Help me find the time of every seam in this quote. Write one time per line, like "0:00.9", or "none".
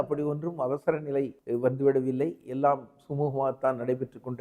0:01.4